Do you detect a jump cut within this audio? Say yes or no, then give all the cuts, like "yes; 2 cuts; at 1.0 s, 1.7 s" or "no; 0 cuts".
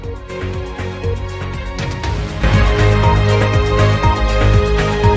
yes; 1 cut; at 0.9 s